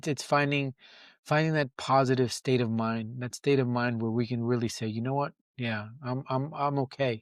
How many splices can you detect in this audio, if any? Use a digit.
0